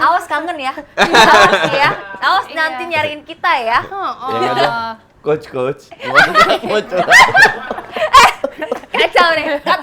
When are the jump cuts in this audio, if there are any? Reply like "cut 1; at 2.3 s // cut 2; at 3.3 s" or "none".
none